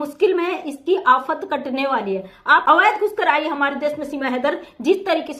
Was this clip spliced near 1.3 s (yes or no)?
no